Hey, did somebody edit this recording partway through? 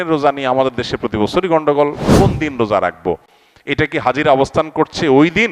yes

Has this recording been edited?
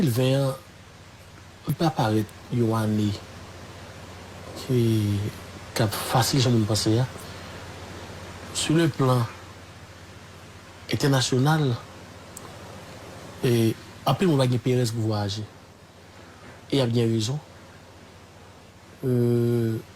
yes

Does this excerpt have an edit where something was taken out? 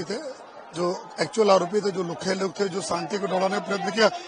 no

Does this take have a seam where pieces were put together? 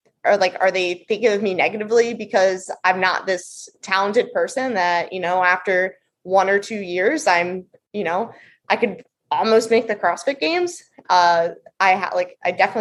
no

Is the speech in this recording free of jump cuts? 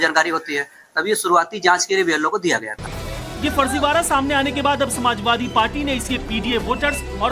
no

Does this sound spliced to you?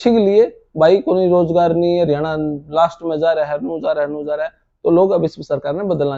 no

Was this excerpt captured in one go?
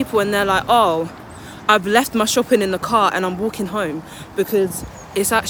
yes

